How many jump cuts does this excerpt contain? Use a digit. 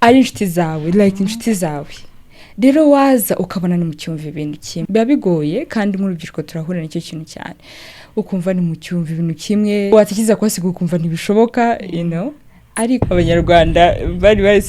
3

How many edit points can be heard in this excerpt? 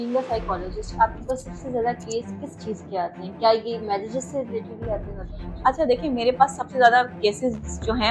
0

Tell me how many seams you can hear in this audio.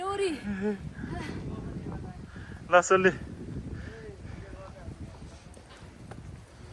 0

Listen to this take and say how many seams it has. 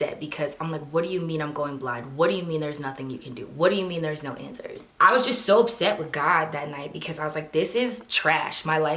1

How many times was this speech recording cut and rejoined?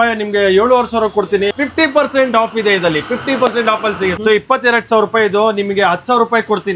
2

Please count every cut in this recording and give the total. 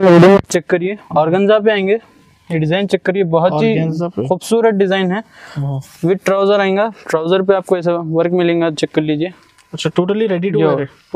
0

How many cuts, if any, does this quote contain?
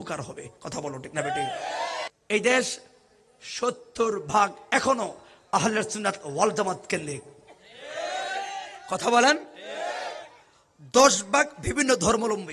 1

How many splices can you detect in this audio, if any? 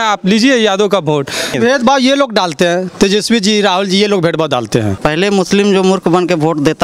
2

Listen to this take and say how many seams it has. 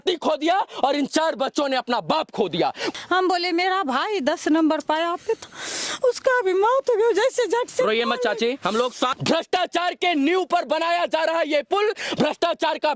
2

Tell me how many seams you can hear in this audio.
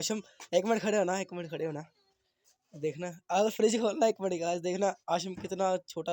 0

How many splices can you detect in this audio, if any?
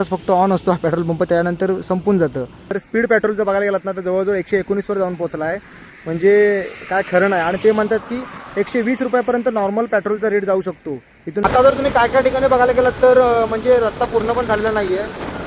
2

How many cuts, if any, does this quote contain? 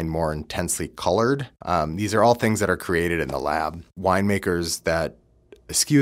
2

